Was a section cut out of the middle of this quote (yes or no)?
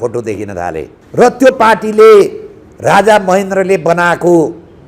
yes